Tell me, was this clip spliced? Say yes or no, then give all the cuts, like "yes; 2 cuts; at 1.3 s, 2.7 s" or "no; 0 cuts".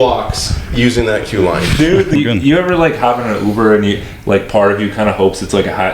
yes; 1 cut; at 2.1 s